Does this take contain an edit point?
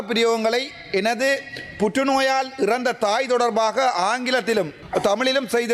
yes; 1 cut; at 4.8 s

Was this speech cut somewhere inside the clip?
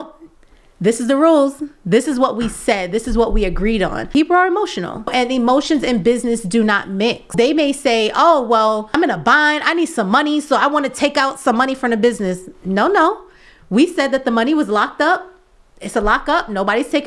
yes; 4 cuts; at 4.0 s, 5.1 s, 7.3 s, 8.9 s

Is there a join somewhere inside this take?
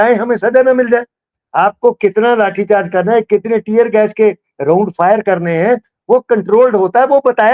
yes; 1 cut; at 1.4 s

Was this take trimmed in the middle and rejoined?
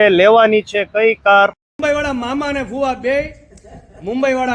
yes; 1 cut; at 1.8 s

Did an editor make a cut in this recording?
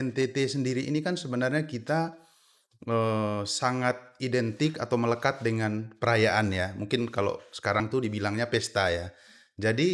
no; 0 cuts

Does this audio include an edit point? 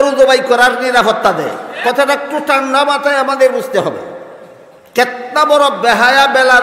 yes; 1 cut; at 1.7 s

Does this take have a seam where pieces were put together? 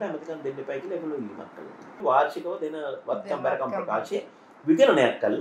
yes; 1 cut; at 1.9 s

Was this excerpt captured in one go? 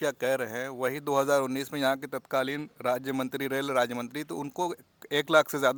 yes; 0 cuts

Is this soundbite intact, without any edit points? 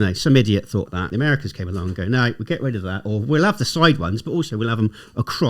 no; 1 cut; at 1.1 s

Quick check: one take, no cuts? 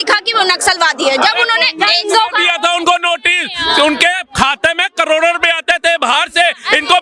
yes; 0 cuts

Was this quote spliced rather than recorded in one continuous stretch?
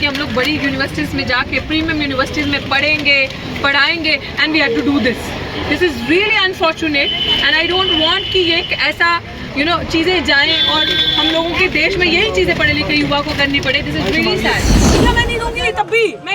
yes; 1 cut; at 14.9 s

